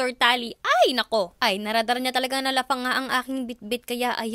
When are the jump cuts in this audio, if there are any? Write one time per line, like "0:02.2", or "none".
none